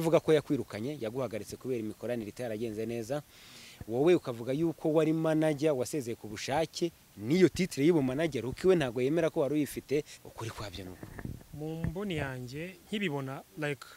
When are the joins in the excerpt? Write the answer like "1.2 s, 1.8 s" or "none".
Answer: 10.2 s, 11.4 s